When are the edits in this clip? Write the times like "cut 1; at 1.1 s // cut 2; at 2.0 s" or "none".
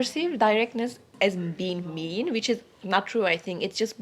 cut 1; at 1.1 s